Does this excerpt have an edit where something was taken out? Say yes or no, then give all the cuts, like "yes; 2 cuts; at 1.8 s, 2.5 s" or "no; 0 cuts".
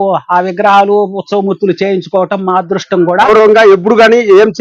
yes; 1 cut; at 3.3 s